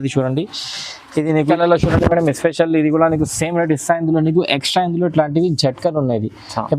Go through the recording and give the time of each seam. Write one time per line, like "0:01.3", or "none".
0:01.5